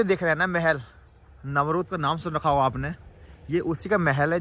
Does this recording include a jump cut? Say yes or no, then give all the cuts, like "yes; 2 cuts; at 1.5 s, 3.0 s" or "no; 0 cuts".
no; 0 cuts